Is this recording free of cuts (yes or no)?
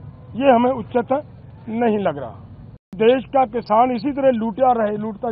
no